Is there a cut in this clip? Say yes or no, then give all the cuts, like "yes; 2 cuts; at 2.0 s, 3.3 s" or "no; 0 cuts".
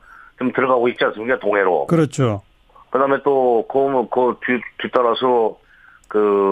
no; 0 cuts